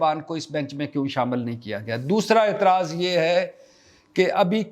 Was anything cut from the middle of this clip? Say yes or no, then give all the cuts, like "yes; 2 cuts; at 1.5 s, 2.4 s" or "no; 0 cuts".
no; 0 cuts